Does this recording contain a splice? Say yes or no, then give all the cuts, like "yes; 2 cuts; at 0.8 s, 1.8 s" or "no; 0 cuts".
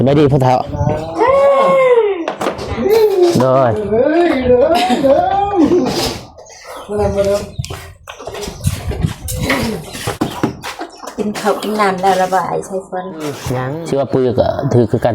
yes; 1 cut; at 13.5 s